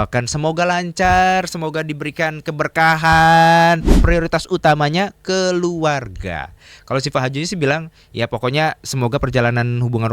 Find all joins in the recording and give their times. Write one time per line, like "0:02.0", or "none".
0:04.0